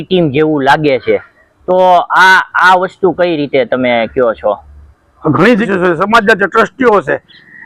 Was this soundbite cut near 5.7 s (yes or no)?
yes